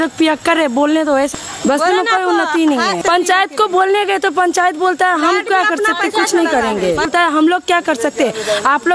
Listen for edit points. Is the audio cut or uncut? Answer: cut